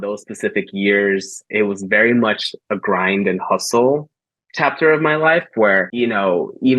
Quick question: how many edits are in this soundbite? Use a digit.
1